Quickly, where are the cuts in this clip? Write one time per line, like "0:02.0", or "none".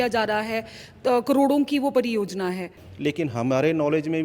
0:02.8